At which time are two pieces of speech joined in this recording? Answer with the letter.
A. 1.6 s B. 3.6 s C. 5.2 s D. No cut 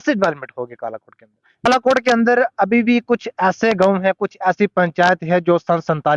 A